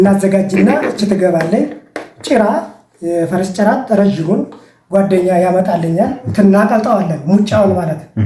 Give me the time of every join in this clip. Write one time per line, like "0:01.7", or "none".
0:06.2